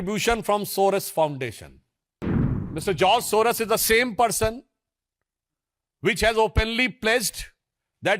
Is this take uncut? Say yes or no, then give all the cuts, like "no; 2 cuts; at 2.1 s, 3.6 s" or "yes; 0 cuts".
no; 1 cut; at 2.4 s